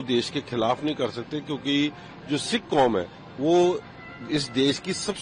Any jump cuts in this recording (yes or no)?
no